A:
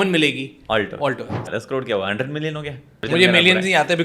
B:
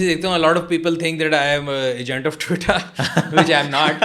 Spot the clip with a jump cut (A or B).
A